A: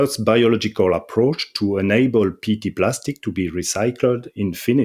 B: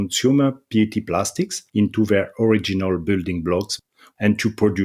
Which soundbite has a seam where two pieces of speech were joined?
B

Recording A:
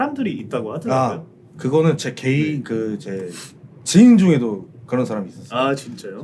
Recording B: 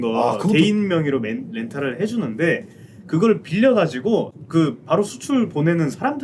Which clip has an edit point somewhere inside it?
B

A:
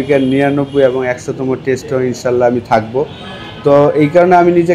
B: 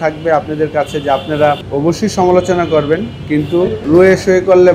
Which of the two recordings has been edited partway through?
B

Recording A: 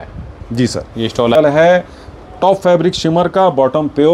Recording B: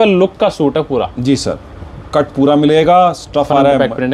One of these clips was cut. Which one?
A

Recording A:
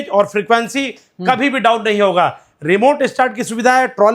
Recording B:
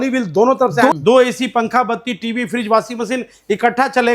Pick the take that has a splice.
B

